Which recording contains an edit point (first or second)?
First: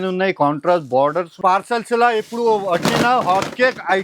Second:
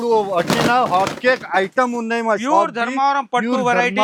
first